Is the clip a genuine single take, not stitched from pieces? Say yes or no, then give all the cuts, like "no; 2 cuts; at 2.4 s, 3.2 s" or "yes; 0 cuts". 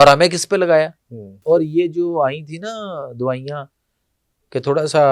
no; 1 cut; at 1.4 s